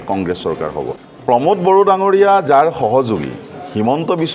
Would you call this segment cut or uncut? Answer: cut